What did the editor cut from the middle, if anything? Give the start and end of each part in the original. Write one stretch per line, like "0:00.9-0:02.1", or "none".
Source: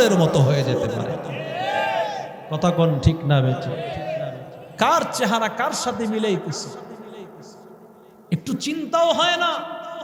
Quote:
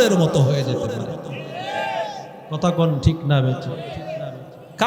none